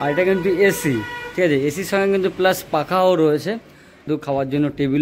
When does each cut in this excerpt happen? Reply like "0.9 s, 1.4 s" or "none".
4.1 s